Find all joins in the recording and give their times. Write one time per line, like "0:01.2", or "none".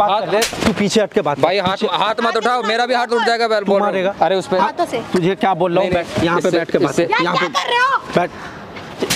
0:04.1